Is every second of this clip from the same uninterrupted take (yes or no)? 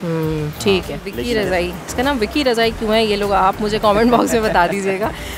no